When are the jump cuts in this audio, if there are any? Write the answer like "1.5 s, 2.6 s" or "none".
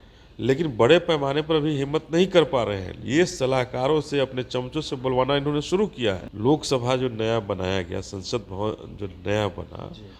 6.3 s